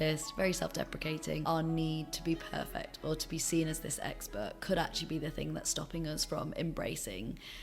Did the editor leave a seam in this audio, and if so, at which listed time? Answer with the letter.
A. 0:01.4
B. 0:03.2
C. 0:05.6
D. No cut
A